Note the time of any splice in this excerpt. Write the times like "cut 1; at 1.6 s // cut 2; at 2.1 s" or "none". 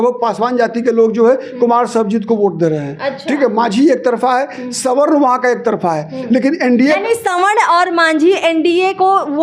none